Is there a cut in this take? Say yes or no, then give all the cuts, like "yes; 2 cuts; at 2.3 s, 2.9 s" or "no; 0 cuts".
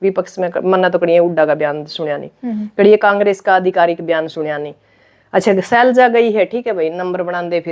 no; 0 cuts